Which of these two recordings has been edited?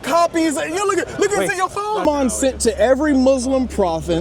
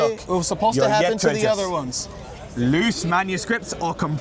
first; 1 cut; at 2.1 s

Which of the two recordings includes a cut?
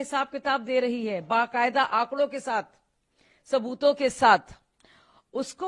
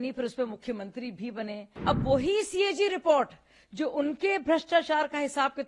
second; 1 cut; at 1.7 s

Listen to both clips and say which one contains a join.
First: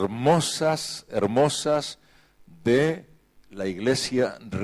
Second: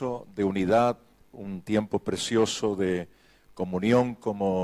first; 1 cut; at 1.5 s

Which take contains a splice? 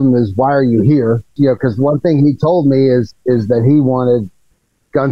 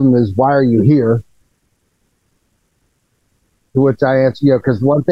first; 1 cut; at 1.3 s

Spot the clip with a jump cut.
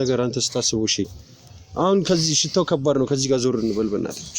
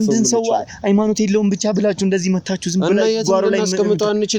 first; 1 cut; at 1.2 s

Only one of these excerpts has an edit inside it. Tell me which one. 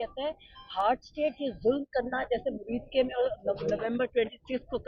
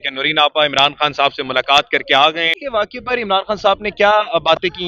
second; 1 cut; at 2.6 s

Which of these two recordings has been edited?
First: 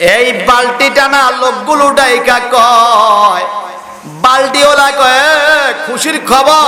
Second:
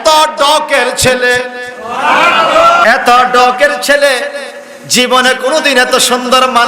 second; 1 cut; at 2.8 s

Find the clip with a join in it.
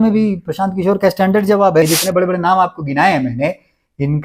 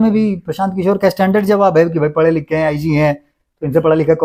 first; 1 cut; at 1.8 s

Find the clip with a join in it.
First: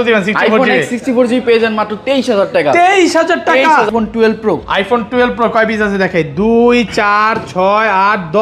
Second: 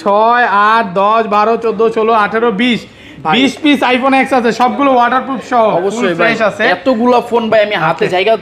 first; 1 cut; at 3.9 s

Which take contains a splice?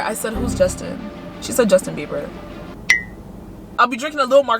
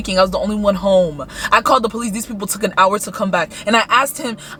first; 1 cut; at 3.7 s

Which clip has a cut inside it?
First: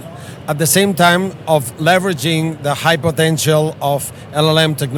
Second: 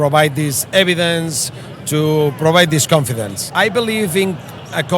second; 1 cut; at 3.4 s

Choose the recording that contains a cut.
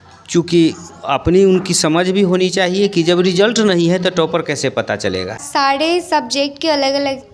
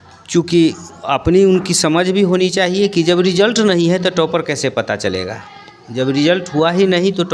first; 1 cut; at 5.4 s

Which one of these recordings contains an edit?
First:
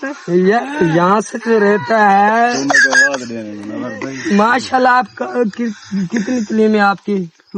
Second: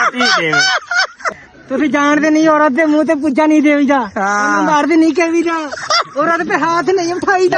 second; 1 cut; at 1.2 s

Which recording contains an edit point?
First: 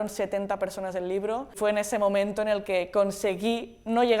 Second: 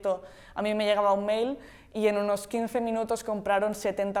first; 1 cut; at 1.6 s

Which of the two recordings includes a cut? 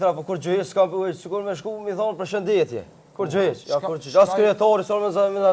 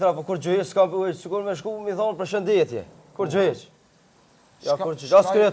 first; 1 cut; at 3.6 s

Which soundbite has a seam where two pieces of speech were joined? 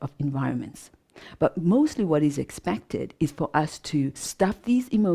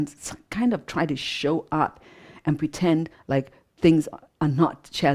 first; 1 cut; at 4.2 s

